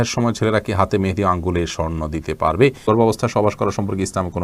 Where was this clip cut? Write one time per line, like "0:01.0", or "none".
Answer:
0:02.8

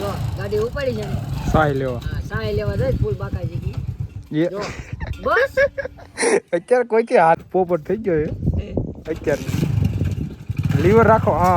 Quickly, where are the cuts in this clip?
0:07.4

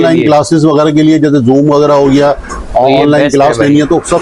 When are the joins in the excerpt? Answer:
none

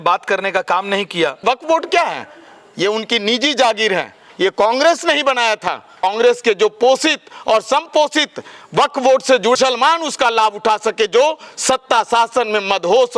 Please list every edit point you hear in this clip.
0:01.4
0:06.0
0:09.5

